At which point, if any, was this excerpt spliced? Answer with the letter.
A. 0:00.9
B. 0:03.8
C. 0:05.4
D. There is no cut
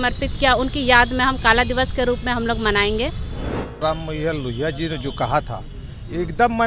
B